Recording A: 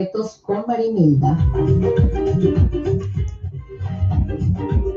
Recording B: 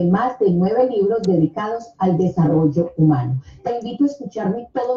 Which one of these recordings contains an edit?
A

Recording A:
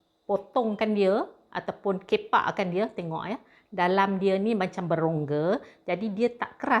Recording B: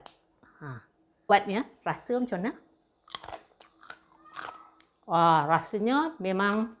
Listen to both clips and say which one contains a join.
B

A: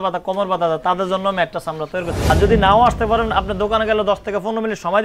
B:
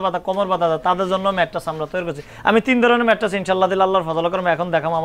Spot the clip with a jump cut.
A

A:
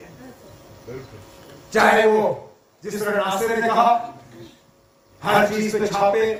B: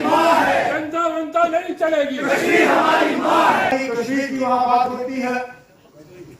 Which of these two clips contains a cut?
B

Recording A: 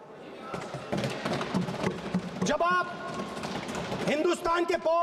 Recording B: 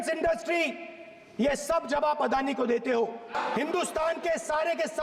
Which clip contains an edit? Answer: B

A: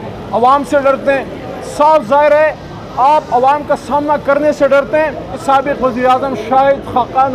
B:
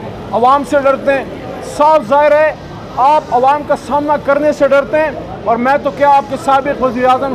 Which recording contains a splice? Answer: A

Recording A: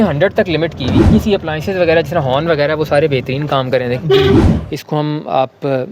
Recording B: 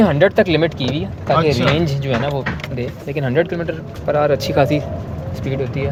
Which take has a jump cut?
A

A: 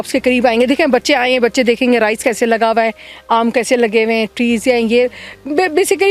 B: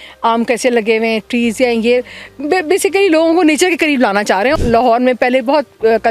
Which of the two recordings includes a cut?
B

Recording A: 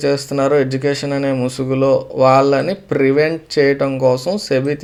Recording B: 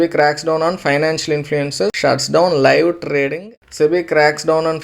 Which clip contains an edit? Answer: B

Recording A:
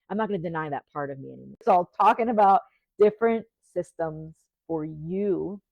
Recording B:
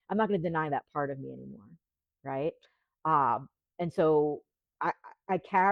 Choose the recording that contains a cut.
A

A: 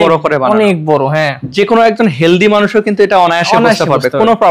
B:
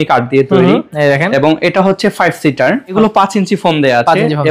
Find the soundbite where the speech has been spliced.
B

